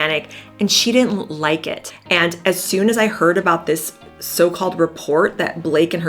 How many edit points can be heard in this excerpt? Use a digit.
1